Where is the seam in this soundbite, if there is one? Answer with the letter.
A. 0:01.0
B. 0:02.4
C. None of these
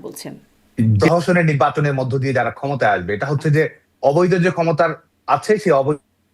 A